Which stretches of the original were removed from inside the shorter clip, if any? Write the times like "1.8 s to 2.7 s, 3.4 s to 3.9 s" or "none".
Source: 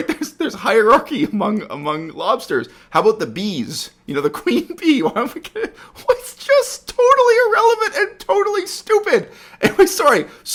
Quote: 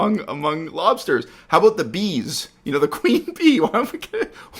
none